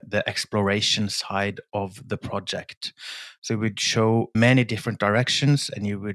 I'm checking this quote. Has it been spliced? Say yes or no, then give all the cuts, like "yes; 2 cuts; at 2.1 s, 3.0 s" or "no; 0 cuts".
yes; 1 cut; at 4.3 s